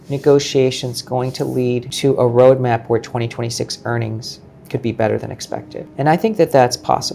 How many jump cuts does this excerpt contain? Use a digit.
2